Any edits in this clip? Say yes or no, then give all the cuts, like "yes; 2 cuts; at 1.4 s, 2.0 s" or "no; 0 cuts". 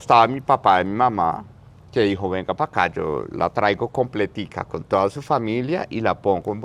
no; 0 cuts